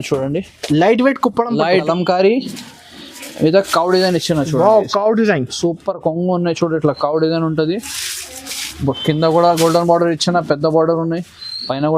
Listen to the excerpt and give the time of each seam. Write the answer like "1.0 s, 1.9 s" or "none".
1.8 s